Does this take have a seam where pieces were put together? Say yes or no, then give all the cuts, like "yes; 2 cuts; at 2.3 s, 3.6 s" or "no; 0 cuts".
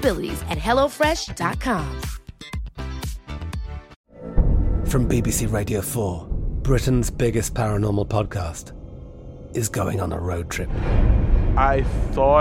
yes; 1 cut; at 4.0 s